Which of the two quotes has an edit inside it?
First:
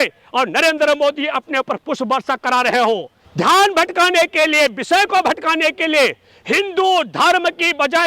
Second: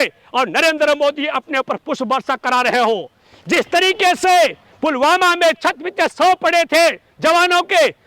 first; 1 cut; at 3.2 s

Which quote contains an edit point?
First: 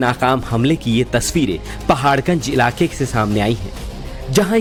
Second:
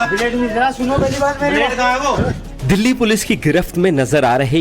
second; 2 cuts; at 2.4 s, 3.2 s

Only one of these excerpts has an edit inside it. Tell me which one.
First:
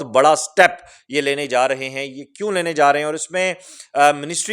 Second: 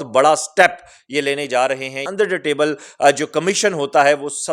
second; 1 cut; at 2.0 s

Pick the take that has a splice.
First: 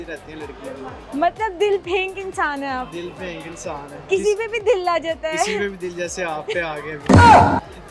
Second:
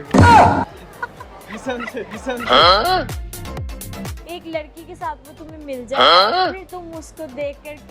second; 1 cut; at 4.2 s

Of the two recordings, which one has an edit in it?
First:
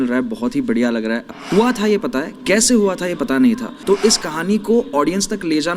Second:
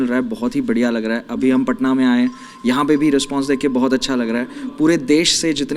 first; 2 cuts; at 1.3 s, 3.7 s

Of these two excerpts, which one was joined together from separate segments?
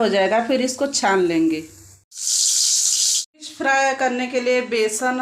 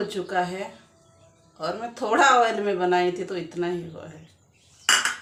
first; 2 cuts; at 2.1 s, 3.3 s

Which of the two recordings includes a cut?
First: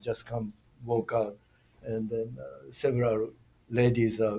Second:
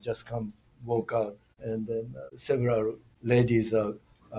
second; 2 cuts; at 1.9 s, 3.1 s

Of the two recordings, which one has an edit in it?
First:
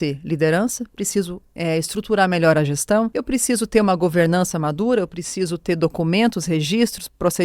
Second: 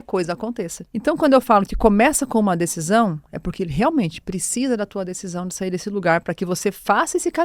first; 1 cut; at 3.2 s

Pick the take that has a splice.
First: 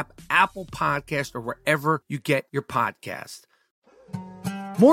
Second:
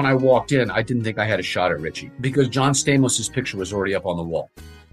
first; 1 cut; at 4.0 s

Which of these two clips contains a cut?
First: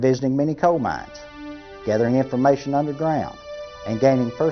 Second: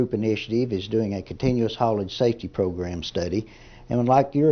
second; 1 cut; at 2.8 s

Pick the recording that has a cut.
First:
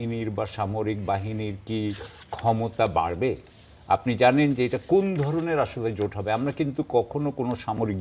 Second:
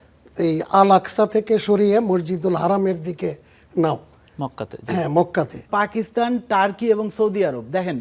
second; 1 cut; at 5.7 s

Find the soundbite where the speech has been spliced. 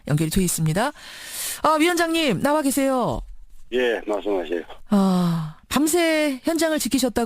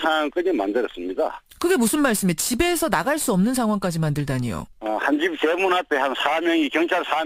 first; 1 cut; at 6.2 s

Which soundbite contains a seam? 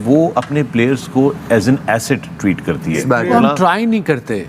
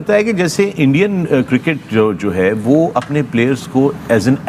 first; 1 cut; at 3.0 s

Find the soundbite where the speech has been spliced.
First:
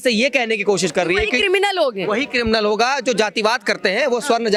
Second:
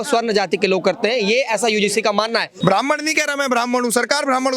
second; 1 cut; at 2.5 s

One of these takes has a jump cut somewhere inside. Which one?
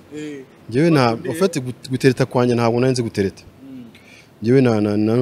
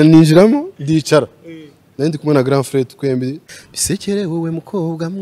second; 1 cut; at 3.4 s

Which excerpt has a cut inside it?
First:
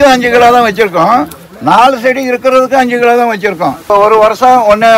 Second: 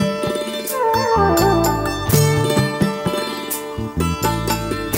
first; 1 cut; at 3.9 s

